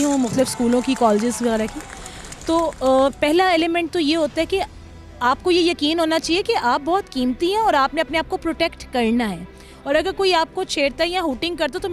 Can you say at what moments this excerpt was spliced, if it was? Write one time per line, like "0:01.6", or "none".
none

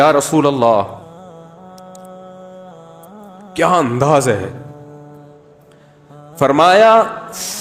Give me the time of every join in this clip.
0:01.0
0:03.5
0:04.6
0:06.4

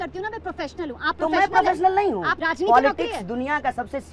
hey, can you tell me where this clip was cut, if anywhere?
0:02.3

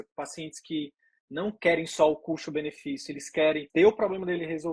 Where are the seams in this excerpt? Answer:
0:03.6

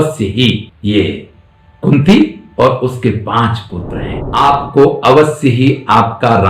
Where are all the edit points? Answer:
0:04.2

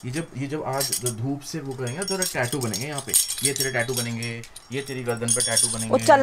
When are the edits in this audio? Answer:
none

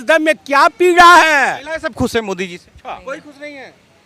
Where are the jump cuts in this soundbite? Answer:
0:01.6
0:02.9

